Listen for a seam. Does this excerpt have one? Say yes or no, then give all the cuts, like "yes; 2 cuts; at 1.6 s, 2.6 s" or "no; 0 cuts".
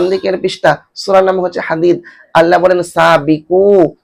no; 0 cuts